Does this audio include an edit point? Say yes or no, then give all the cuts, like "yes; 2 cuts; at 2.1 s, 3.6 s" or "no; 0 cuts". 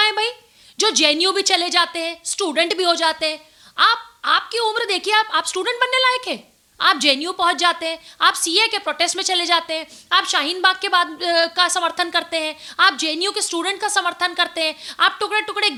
no; 0 cuts